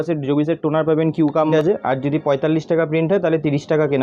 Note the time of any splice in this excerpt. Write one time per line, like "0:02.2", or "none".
0:01.5